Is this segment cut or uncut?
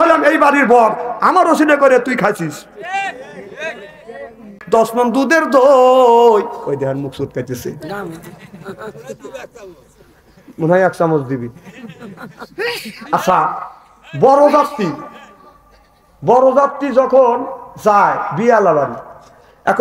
cut